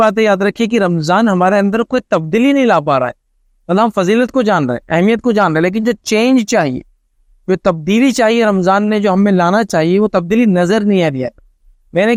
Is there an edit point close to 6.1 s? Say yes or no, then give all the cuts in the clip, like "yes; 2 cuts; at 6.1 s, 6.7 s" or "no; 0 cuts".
no; 0 cuts